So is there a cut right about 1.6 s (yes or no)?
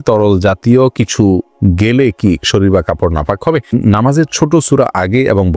no